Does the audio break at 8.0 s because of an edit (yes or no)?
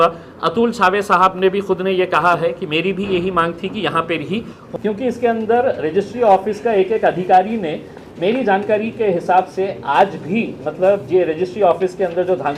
no